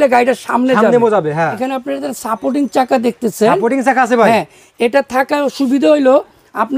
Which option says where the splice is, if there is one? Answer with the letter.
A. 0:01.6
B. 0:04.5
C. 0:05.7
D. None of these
A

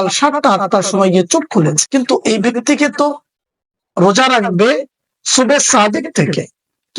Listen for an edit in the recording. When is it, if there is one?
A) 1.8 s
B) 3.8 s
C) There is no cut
A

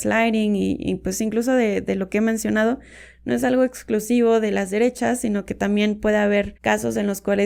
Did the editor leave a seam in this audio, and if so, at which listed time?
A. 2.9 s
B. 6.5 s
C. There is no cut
B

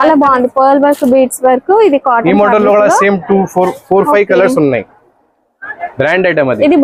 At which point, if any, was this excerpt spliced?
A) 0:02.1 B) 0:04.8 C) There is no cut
C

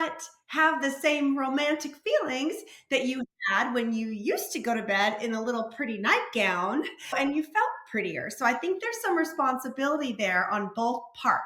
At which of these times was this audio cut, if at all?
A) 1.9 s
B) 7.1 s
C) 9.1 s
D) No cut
B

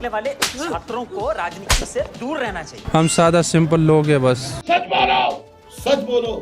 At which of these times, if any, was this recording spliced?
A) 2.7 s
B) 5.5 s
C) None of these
A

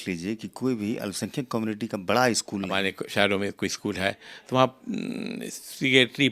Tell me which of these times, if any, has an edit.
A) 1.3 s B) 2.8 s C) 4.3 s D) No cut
B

